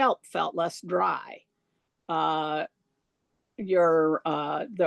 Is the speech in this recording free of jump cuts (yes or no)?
yes